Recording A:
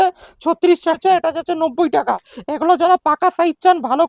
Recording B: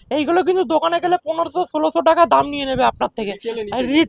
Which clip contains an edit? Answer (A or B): A